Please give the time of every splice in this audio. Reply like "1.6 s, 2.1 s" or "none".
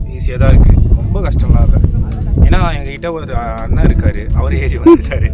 none